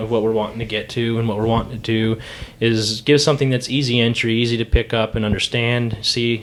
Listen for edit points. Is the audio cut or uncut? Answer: uncut